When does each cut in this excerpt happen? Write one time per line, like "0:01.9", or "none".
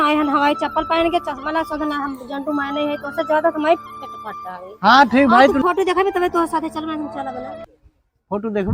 0:05.6